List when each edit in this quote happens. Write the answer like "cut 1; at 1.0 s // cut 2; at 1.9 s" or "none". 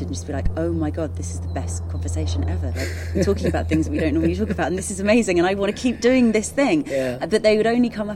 none